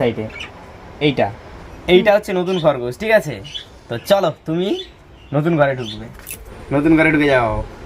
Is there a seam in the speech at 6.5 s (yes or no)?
yes